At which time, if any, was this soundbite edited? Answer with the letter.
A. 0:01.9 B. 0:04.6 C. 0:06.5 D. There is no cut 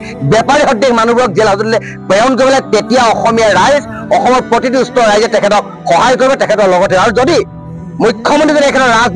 D